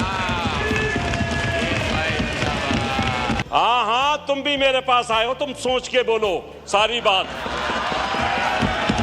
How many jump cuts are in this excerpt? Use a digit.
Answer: 1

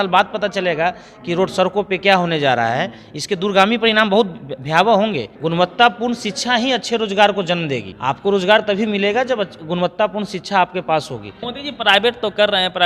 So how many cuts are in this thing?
3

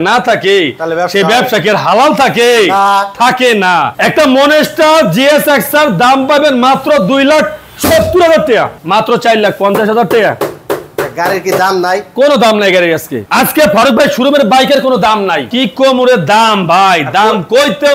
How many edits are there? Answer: 3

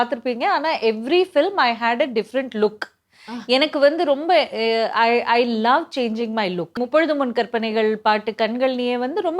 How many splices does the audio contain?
1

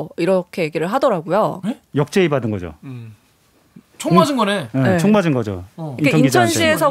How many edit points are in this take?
0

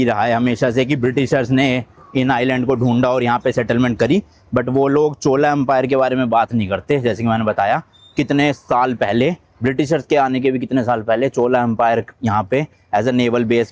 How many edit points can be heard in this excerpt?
0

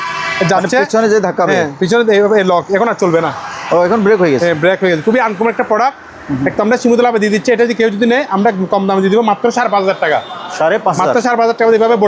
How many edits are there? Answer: 0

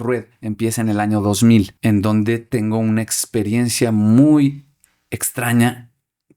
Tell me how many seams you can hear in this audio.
1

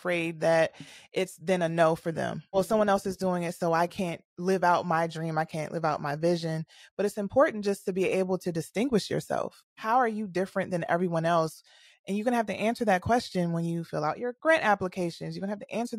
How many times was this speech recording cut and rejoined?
1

